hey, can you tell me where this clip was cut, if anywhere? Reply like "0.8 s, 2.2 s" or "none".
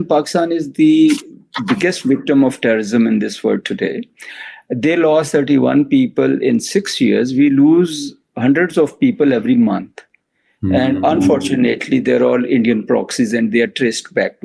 none